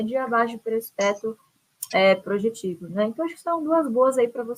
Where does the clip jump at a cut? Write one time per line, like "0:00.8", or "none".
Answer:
none